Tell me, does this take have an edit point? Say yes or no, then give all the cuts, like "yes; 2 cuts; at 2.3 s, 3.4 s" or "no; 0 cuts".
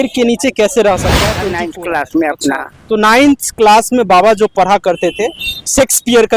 yes; 1 cut; at 1.4 s